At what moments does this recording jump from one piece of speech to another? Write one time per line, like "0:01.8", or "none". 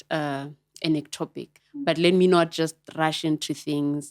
0:01.8